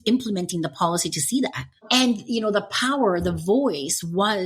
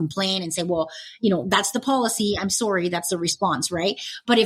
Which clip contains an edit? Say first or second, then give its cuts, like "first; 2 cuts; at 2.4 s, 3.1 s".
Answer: first; 1 cut; at 1.8 s